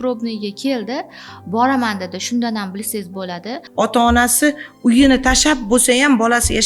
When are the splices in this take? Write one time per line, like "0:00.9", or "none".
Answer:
0:03.6